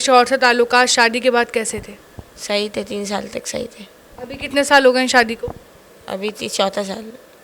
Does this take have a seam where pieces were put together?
no; 0 cuts

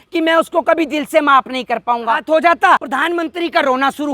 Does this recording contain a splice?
yes; 2 cuts; at 2.2 s, 2.9 s

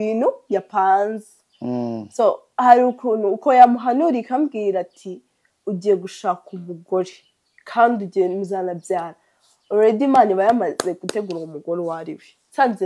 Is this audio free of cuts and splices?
yes; 0 cuts

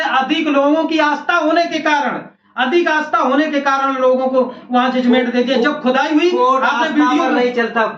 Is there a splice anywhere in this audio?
no; 0 cuts

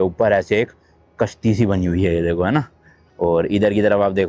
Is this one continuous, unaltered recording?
yes; 0 cuts

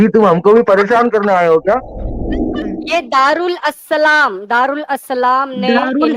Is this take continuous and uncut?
no; 1 cut; at 2.5 s

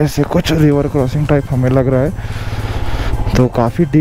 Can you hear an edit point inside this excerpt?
no; 0 cuts

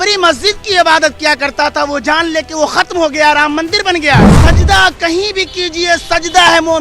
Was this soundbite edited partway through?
yes; 1 cut; at 4.3 s

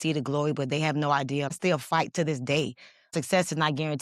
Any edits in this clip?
yes; 2 cuts; at 1.5 s, 3.1 s

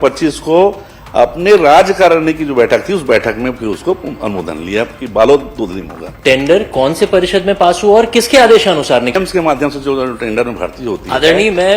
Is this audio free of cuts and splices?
no; 2 cuts; at 6.0 s, 9.2 s

